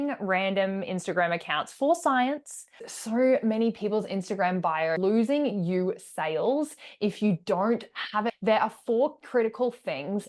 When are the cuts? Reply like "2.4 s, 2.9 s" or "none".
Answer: 2.9 s, 5.0 s, 8.3 s